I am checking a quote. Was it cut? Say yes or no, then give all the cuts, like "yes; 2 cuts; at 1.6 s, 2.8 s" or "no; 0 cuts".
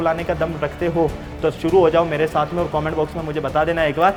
no; 0 cuts